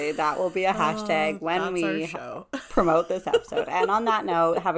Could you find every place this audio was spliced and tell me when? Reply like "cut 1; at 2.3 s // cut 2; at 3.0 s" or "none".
none